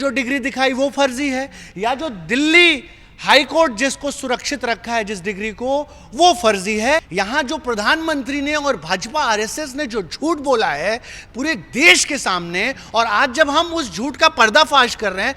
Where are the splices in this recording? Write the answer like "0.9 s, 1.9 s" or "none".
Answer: 7.1 s